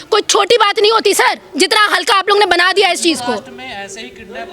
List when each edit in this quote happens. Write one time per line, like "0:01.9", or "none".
none